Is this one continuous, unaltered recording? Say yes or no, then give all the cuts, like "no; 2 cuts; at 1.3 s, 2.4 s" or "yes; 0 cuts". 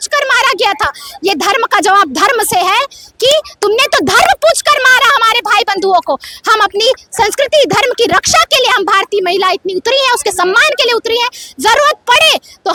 yes; 0 cuts